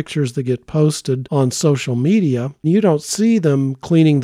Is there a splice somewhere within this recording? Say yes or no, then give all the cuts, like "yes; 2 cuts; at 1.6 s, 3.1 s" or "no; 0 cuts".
yes; 2 cuts; at 1.2 s, 2.5 s